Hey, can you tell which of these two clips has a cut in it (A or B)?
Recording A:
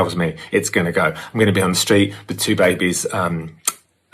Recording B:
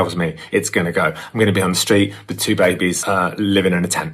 B